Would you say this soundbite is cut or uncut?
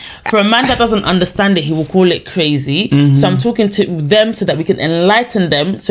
uncut